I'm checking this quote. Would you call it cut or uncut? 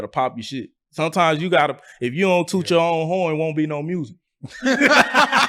uncut